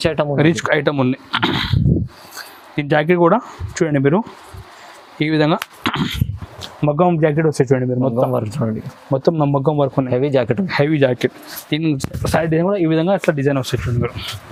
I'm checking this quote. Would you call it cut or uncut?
uncut